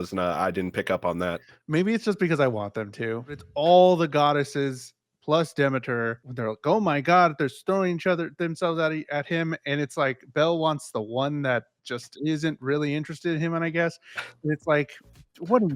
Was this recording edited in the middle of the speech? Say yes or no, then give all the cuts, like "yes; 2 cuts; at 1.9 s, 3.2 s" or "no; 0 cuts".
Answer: yes; 2 cuts; at 3.5 s, 6.2 s